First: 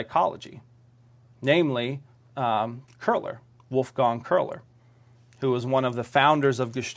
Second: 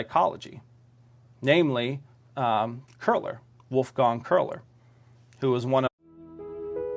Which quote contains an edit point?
first; 1 cut; at 5.9 s

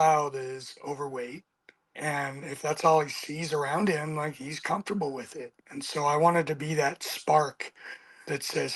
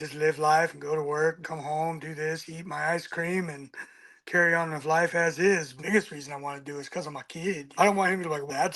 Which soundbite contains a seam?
second; 3 cuts; at 1.4 s, 5.7 s, 7.7 s

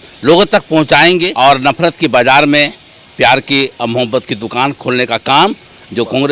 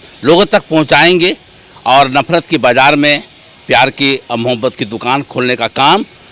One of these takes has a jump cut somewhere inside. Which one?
first; 1 cut; at 1.3 s

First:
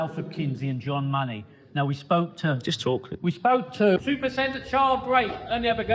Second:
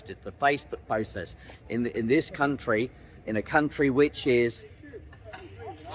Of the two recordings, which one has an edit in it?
first; 1 cut; at 4.0 s

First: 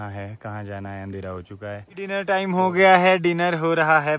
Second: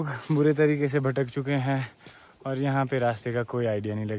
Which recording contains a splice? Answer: first; 1 cut; at 2.2 s

